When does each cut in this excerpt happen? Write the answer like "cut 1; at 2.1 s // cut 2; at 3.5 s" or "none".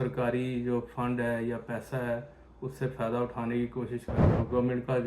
cut 1; at 4.2 s